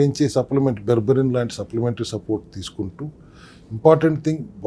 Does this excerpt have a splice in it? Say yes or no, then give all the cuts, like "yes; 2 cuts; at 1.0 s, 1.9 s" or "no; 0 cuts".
no; 0 cuts